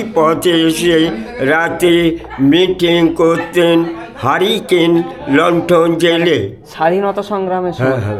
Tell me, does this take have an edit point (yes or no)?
no